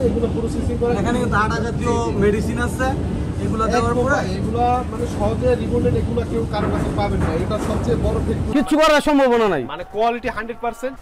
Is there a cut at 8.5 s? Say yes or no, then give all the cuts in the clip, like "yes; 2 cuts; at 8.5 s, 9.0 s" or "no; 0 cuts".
yes; 1 cut; at 8.5 s